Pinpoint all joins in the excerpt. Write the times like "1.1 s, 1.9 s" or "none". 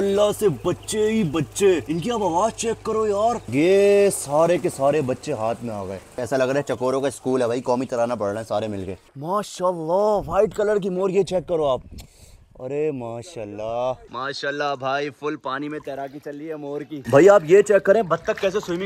3.4 s, 6.2 s, 9.1 s, 14.0 s, 17.0 s